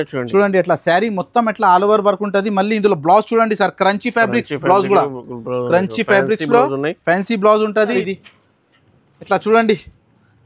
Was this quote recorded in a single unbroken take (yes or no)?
no